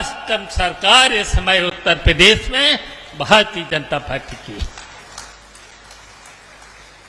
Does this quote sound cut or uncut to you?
uncut